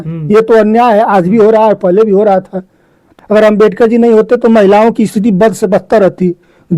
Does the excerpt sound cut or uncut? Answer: cut